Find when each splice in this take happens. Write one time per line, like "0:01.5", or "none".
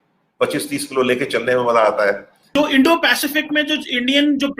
0:02.3